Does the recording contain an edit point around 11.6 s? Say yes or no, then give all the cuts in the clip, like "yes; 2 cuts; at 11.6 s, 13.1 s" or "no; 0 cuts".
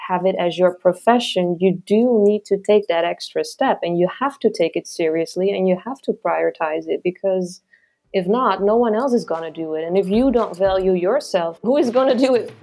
yes; 1 cut; at 11.6 s